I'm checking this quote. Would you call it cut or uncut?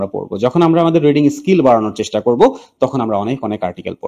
uncut